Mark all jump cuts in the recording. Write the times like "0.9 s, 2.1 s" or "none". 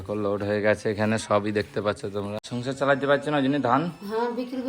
2.5 s

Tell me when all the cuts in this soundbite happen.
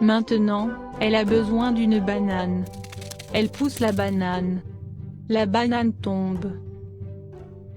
1.1 s, 6.5 s

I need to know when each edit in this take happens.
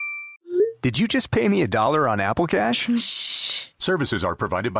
none

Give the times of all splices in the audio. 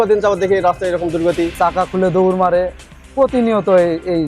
1.6 s

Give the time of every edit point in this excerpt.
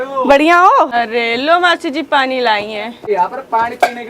0.9 s, 3.1 s

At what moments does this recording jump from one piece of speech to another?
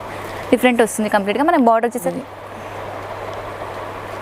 2.0 s

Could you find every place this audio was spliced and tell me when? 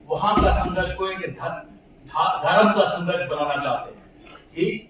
none

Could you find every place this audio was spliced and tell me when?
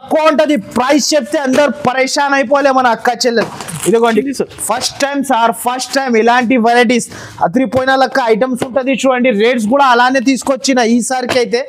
4.3 s

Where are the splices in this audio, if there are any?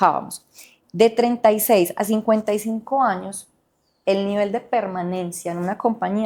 none

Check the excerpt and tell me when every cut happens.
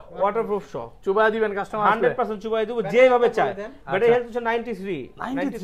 none

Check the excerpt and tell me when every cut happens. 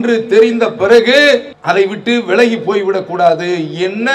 1.5 s

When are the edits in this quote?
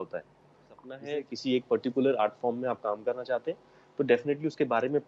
0.9 s

